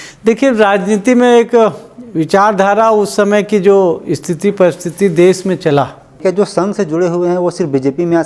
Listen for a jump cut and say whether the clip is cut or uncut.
cut